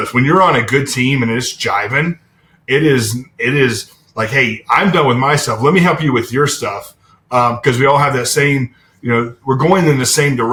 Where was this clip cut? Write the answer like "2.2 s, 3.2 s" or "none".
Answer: none